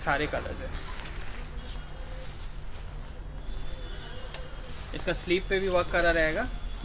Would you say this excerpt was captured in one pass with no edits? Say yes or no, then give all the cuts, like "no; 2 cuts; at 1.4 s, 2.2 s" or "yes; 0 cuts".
yes; 0 cuts